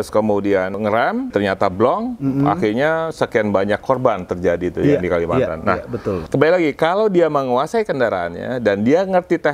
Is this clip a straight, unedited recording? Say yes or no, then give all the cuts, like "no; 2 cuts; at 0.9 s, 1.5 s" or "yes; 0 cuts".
no; 2 cuts; at 1.3 s, 6.2 s